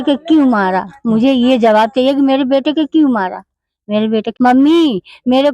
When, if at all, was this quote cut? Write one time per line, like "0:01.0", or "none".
0:04.3